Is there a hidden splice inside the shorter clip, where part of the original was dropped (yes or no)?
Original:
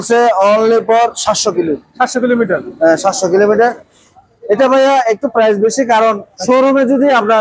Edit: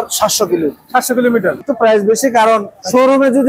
yes